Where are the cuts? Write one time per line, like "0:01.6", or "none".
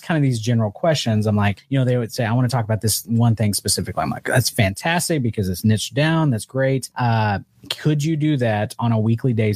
0:01.6
0:06.9

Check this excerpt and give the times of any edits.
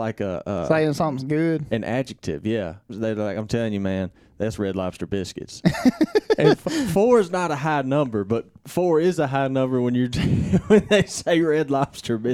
0:02.9

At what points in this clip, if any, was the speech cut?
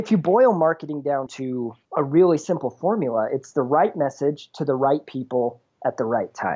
0:01.4

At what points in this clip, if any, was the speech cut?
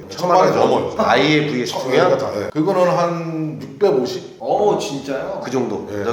0:00.9
0:02.5

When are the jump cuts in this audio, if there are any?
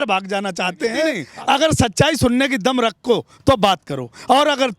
0:01.2

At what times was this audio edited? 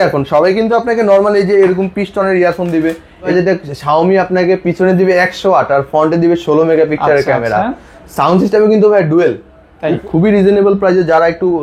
0:03.3
0:10.0

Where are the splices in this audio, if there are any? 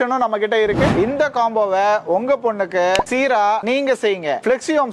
0:00.9
0:03.6

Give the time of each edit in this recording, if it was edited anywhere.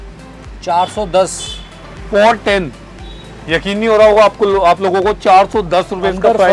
none

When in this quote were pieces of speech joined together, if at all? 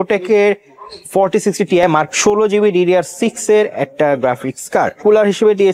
0:02.1
0:05.0

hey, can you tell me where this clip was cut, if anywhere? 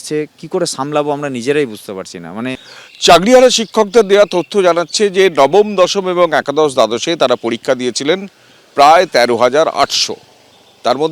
0:02.7

